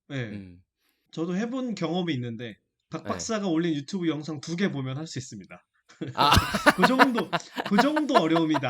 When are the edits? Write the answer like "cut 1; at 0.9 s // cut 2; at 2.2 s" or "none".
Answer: cut 1; at 1.0 s